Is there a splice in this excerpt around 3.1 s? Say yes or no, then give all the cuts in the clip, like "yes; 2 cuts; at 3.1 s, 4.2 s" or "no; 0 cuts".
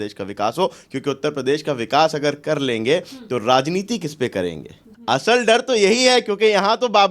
no; 1 cut; at 4.9 s